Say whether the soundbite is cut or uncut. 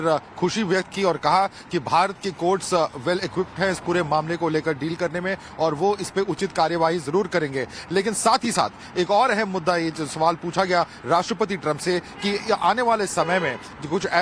cut